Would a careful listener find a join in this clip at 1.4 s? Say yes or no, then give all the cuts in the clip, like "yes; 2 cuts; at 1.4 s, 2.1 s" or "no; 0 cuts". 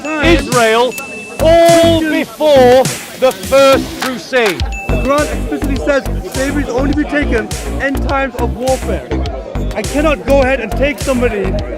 no; 2 cuts; at 3.1 s, 4.7 s